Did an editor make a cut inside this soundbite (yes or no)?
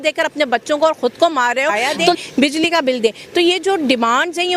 yes